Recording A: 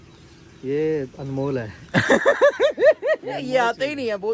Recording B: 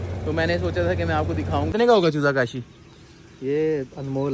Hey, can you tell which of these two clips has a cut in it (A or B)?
B